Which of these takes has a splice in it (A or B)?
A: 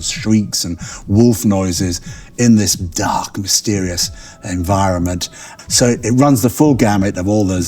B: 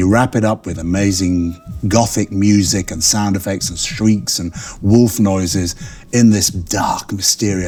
A